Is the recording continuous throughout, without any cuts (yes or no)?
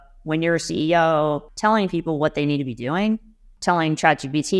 no